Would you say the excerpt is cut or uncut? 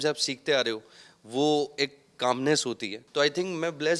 cut